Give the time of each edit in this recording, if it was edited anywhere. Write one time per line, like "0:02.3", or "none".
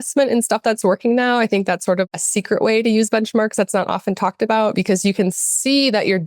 0:02.1